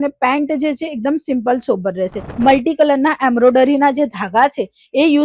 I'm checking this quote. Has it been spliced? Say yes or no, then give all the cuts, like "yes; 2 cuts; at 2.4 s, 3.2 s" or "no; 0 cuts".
yes; 1 cut; at 2.3 s